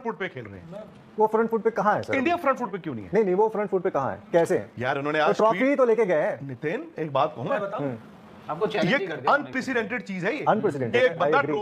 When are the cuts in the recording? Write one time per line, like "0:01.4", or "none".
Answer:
none